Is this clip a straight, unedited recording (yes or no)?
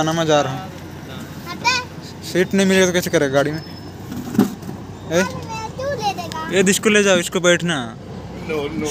yes